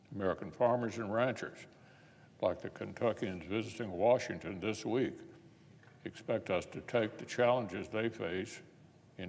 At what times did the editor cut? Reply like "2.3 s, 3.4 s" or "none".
2.5 s, 7.5 s